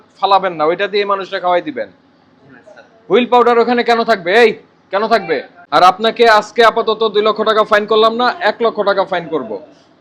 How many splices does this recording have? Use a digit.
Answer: 1